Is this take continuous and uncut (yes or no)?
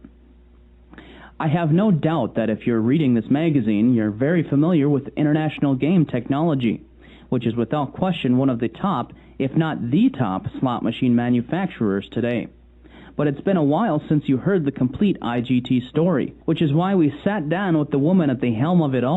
no